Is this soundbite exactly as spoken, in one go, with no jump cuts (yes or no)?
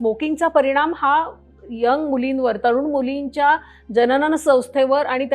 yes